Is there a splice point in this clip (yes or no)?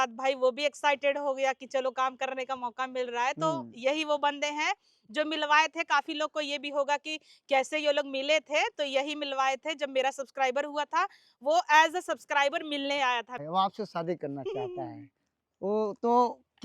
yes